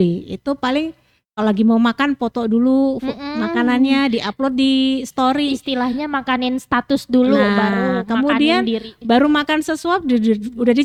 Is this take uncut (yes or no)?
yes